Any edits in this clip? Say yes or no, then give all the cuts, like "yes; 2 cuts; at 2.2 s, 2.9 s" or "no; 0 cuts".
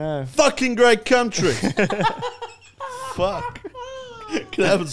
no; 0 cuts